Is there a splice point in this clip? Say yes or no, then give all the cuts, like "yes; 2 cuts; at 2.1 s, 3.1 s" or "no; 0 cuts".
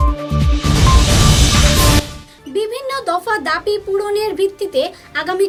no; 0 cuts